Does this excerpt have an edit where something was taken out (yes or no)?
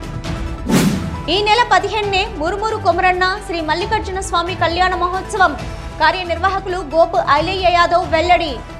yes